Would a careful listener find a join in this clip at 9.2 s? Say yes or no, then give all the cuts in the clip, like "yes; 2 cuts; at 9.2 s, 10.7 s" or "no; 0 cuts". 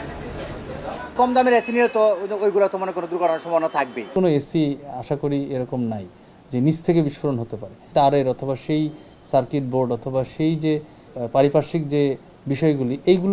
no; 4 cuts; at 1.0 s, 4.1 s, 7.9 s, 11.0 s